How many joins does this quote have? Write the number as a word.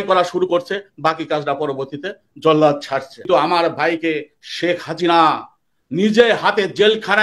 one